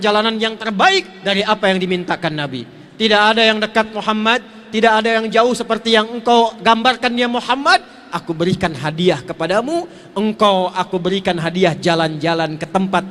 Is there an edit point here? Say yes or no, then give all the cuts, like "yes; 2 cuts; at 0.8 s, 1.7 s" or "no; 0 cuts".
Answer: no; 0 cuts